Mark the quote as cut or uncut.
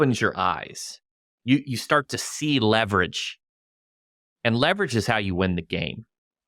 uncut